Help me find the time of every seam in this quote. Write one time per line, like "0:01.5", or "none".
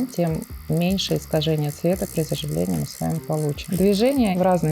0:03.6

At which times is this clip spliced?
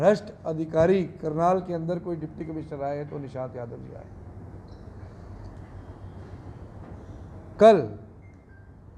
none

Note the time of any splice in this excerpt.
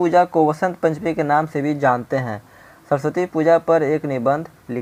none

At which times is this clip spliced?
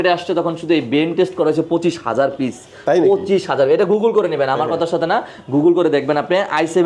none

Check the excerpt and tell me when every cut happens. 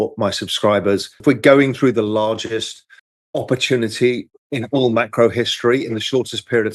0:01.1

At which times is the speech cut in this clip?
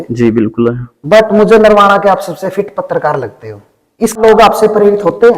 0:04.2

